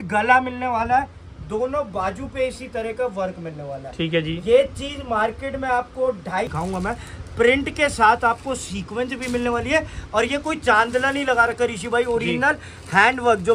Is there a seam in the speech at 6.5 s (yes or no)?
yes